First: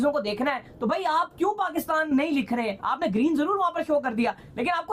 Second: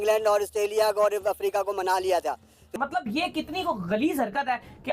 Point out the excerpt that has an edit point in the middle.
second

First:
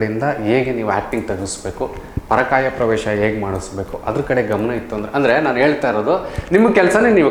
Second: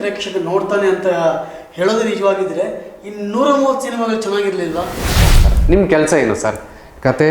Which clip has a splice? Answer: second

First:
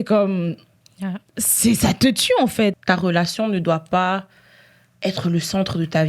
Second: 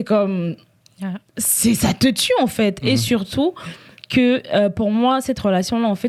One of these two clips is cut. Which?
first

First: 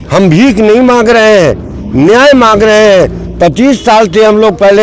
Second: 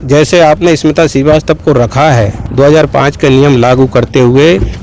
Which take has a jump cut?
second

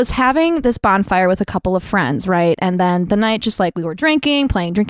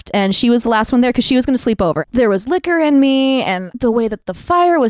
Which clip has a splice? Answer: second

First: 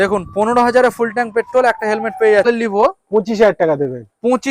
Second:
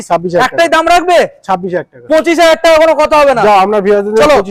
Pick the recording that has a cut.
first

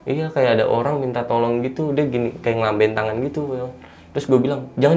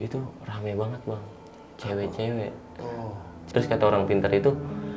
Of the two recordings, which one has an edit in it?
second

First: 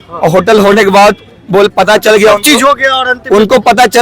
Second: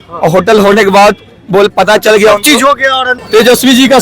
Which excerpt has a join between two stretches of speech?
second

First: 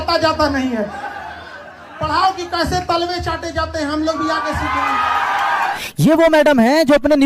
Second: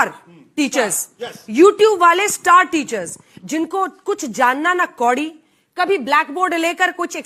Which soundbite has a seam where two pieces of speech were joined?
first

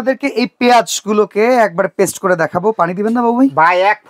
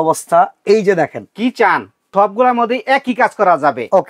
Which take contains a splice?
second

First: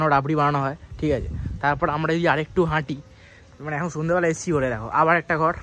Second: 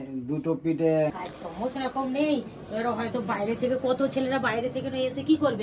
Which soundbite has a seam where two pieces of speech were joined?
second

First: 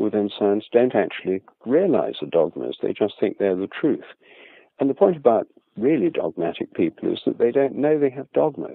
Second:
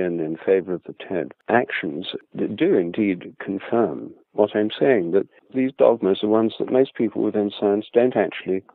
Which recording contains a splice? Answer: second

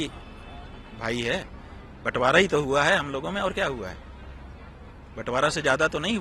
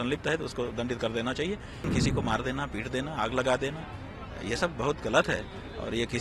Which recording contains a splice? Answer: second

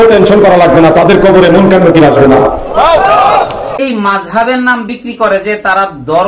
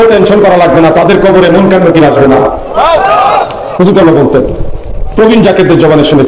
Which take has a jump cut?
first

